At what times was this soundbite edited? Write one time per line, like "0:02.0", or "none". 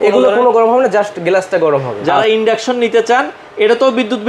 0:02.0